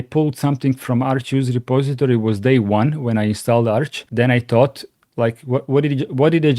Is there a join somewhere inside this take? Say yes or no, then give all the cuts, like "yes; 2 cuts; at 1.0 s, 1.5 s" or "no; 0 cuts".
yes; 1 cut; at 4.0 s